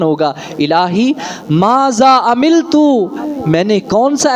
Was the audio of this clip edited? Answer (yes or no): no